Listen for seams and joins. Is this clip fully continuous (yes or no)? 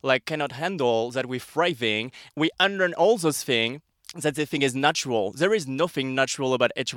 yes